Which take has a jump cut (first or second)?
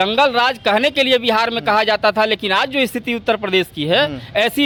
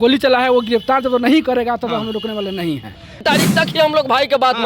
second